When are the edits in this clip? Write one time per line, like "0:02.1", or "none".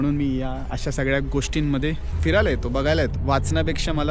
0:02.1
0:03.2

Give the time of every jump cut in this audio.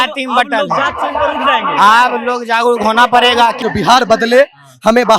0:03.6

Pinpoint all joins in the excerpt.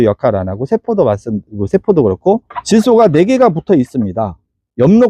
0:02.5

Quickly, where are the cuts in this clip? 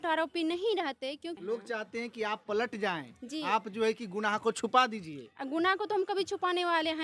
0:01.3

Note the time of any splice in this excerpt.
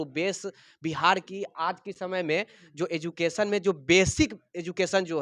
none

